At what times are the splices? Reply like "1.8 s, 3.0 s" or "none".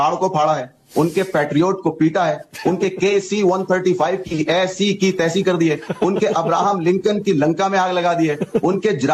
none